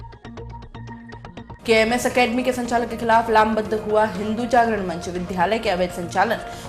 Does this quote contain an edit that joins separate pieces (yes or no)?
yes